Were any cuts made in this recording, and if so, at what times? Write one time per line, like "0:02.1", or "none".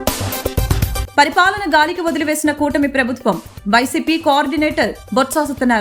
0:01.0